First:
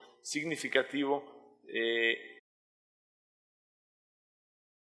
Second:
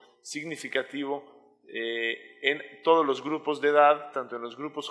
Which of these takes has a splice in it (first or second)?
second